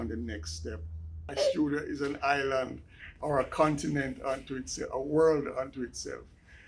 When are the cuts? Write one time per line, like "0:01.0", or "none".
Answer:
0:01.3